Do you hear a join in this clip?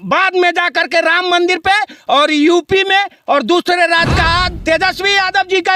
yes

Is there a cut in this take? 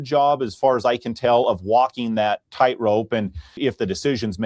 yes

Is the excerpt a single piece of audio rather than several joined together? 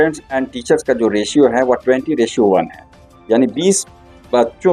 yes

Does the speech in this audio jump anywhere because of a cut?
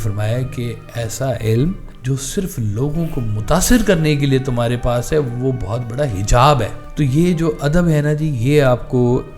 yes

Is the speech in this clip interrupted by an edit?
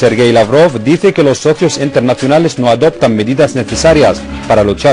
no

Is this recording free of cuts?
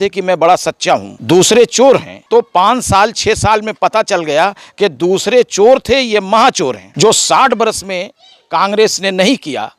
no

